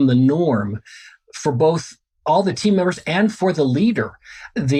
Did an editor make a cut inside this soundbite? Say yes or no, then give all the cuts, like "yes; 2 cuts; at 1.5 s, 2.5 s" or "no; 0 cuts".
no; 0 cuts